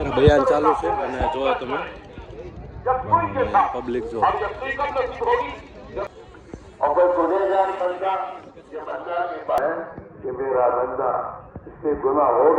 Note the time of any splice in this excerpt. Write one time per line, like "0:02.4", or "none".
0:06.1
0:09.6